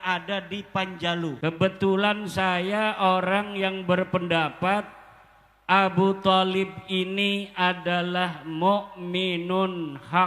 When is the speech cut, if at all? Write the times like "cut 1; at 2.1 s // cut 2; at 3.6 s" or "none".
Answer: cut 1; at 1.6 s